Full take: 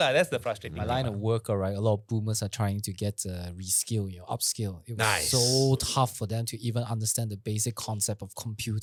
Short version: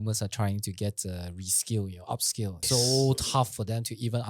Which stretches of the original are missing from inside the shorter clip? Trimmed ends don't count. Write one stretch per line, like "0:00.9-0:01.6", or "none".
0:04.8-0:05.2